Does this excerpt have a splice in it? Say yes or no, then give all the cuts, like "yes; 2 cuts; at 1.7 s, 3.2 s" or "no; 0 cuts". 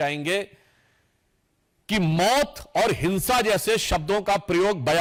no; 0 cuts